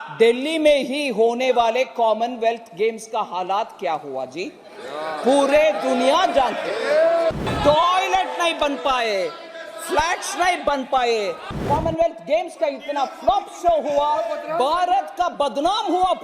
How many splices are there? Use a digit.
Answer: 2